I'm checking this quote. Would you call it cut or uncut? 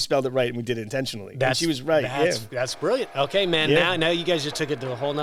uncut